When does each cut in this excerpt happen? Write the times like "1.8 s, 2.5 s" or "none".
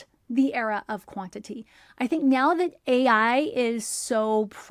none